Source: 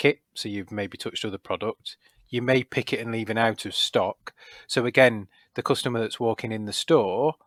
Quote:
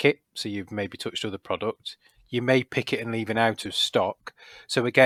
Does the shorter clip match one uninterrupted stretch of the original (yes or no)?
yes